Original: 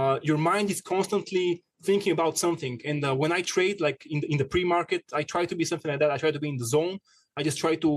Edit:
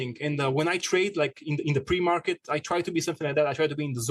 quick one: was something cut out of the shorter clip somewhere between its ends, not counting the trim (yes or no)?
no